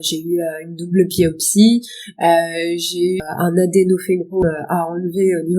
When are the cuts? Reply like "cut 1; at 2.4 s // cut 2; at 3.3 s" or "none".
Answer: cut 1; at 3.2 s // cut 2; at 4.4 s